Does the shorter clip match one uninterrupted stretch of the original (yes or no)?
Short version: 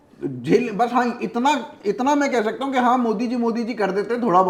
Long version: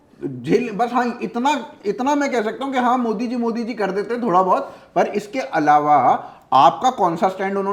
yes